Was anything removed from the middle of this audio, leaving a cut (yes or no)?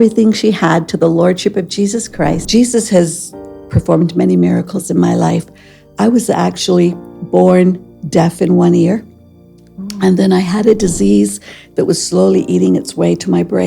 yes